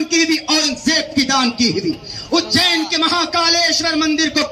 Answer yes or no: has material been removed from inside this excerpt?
no